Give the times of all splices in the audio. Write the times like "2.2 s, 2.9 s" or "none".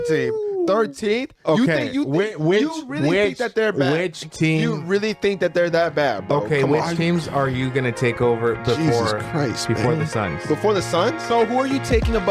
11.3 s